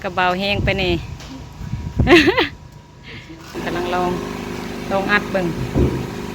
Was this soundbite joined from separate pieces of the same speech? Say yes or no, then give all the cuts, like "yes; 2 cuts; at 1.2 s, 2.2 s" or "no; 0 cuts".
yes; 1 cut; at 3.5 s